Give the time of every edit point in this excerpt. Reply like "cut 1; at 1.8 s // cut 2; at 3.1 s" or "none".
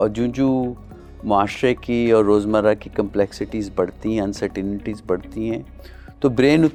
none